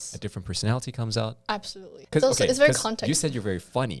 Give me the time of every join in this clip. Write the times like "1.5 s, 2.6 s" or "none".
1.9 s